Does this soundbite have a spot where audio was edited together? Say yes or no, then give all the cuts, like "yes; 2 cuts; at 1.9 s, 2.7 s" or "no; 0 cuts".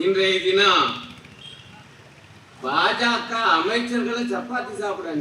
no; 0 cuts